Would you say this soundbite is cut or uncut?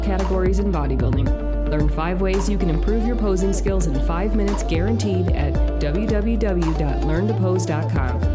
uncut